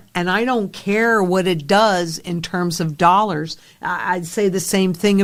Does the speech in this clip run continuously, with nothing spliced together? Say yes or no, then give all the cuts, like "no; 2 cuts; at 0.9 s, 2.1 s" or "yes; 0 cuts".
yes; 0 cuts